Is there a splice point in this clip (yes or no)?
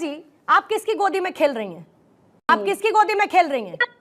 yes